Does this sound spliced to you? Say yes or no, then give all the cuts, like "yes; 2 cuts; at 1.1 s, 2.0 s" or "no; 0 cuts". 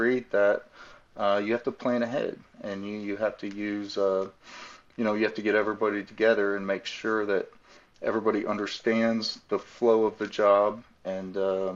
no; 0 cuts